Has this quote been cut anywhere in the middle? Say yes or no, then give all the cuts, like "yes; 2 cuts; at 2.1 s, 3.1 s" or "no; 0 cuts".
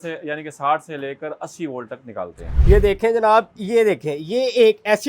yes; 1 cut; at 2.5 s